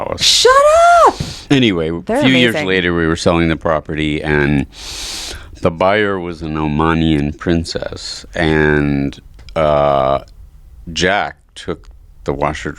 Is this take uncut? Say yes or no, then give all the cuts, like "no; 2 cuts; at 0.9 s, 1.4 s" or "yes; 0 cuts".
no; 1 cut; at 1.3 s